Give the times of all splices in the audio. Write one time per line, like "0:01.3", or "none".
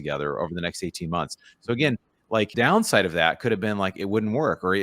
0:02.5